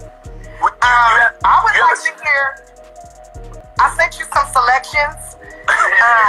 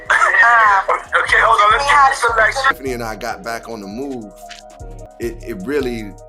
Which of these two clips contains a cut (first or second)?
second